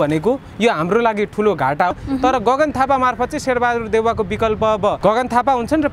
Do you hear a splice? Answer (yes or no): yes